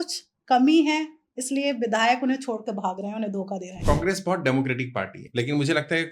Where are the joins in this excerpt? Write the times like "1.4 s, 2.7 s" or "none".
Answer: 3.7 s, 5.2 s